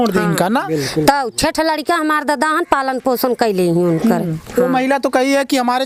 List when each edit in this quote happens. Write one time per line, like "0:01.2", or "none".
none